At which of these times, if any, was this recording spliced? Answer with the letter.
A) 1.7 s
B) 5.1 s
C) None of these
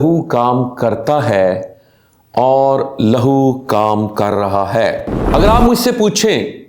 B